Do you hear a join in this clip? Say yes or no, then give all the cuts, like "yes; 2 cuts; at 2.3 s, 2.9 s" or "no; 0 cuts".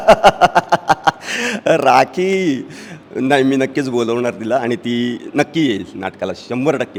no; 0 cuts